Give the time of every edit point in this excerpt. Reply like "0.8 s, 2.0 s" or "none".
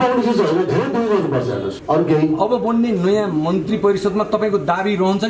1.7 s